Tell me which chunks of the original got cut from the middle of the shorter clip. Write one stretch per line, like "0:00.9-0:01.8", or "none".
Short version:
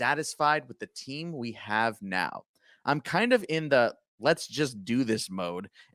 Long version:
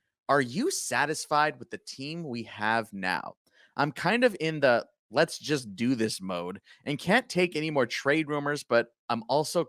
none

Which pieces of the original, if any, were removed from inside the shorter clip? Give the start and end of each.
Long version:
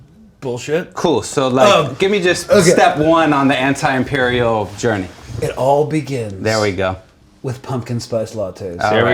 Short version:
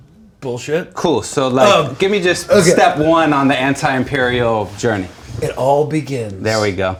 none

